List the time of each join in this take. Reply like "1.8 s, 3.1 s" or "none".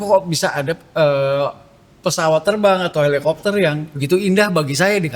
3.9 s